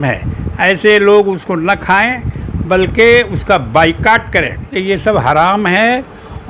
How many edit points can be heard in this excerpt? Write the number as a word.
one